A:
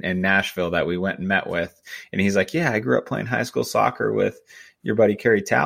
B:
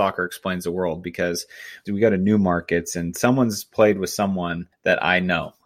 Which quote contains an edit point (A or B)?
B